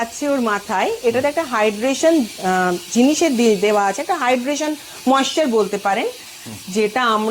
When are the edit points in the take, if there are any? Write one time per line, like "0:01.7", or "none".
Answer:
none